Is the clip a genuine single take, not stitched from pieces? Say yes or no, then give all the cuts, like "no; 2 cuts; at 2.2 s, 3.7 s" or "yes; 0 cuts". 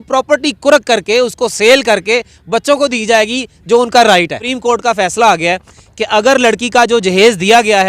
no; 1 cut; at 4.4 s